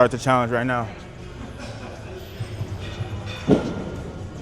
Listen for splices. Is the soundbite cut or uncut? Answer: uncut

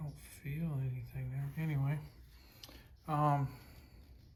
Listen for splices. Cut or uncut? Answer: uncut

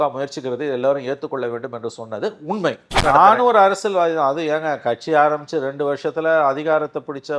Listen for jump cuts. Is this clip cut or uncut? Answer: cut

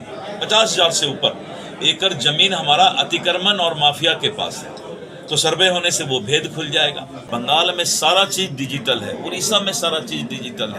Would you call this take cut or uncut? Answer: cut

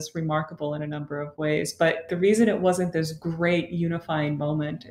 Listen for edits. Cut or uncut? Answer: cut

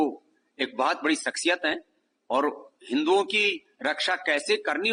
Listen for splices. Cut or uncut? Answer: uncut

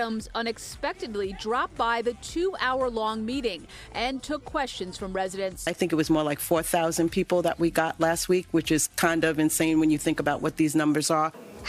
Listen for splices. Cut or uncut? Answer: uncut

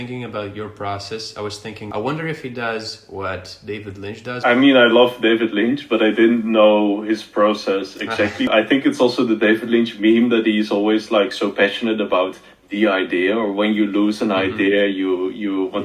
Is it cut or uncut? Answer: cut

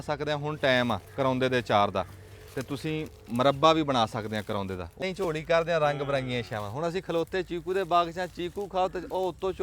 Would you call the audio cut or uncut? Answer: cut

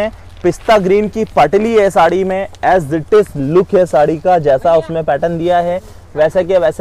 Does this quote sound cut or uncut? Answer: uncut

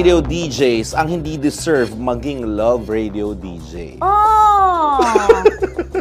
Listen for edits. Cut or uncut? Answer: uncut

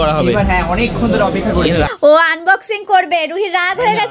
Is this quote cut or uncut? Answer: cut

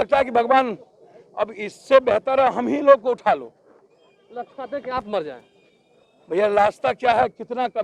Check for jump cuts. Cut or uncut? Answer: uncut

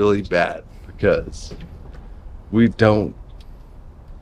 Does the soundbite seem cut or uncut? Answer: uncut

